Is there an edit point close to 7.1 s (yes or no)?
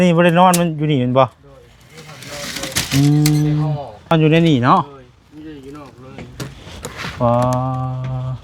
no